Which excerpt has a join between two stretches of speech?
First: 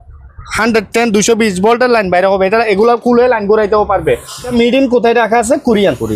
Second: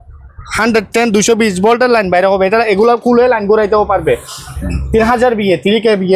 first; 1 cut; at 4.5 s

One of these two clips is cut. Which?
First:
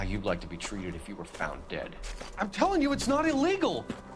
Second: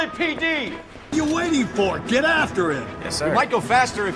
second; 1 cut; at 1.1 s

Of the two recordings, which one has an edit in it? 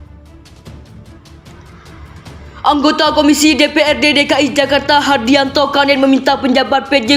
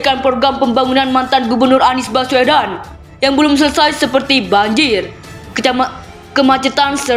first; 1 cut; at 2.6 s

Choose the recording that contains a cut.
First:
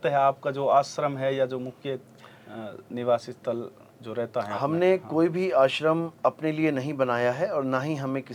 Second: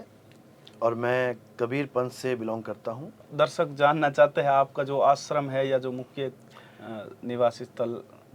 second; 1 cut; at 3.2 s

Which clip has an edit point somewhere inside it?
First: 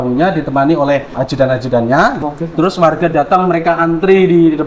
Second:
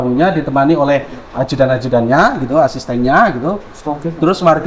first; 2 cuts; at 1.1 s, 2.2 s

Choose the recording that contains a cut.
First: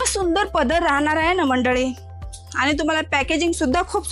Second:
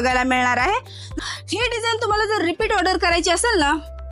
second; 1 cut; at 1.1 s

